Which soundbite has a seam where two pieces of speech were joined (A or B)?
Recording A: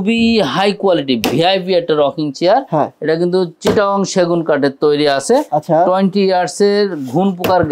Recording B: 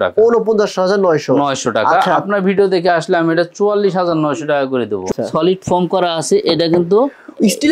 B